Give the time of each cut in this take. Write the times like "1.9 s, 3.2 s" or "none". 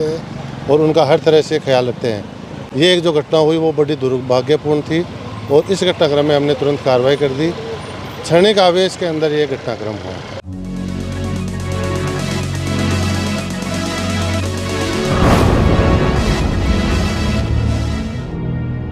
none